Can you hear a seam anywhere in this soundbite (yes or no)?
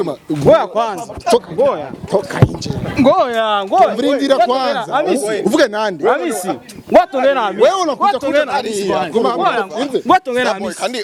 no